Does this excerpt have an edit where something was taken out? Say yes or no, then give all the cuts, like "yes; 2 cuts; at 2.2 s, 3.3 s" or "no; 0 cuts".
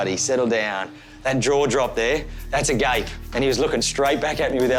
no; 0 cuts